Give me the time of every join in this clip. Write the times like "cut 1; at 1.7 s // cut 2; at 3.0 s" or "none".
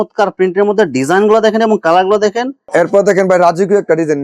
cut 1; at 2.6 s